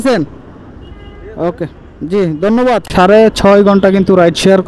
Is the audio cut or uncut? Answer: cut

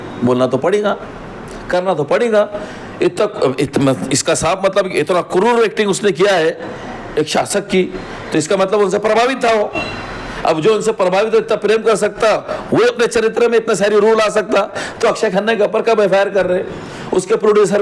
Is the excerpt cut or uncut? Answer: uncut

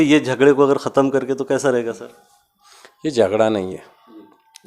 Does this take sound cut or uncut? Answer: uncut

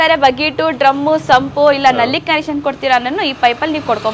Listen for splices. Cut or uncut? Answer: uncut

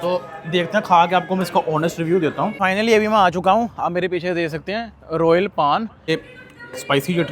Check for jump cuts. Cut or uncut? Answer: cut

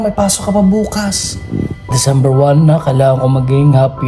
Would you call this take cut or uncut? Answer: cut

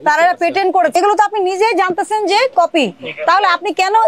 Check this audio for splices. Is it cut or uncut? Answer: cut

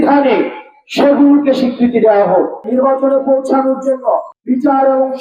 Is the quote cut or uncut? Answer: cut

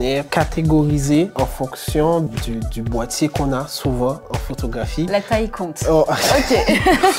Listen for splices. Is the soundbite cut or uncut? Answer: cut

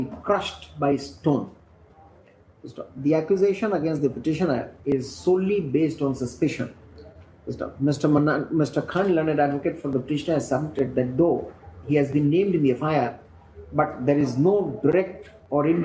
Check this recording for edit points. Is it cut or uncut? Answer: uncut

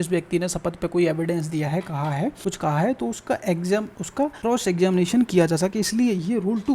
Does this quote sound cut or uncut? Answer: cut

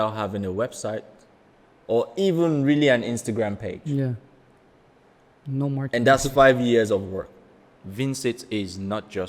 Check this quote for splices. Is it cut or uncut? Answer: cut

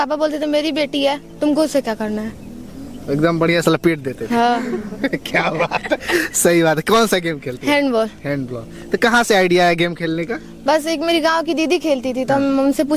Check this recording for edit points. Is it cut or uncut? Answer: uncut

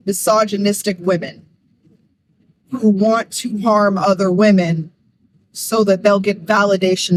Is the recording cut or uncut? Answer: uncut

